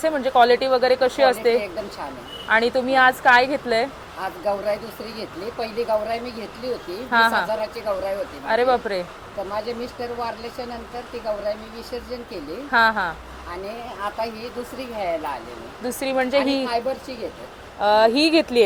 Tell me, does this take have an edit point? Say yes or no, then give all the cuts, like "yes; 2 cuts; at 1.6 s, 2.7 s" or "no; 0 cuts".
no; 0 cuts